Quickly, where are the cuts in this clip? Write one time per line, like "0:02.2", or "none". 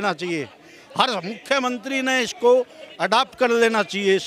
none

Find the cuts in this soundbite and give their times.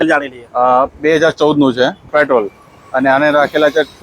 0:02.1

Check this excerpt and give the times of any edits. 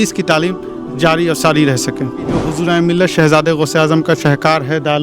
0:02.4

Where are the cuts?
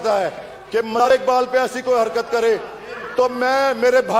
0:01.1

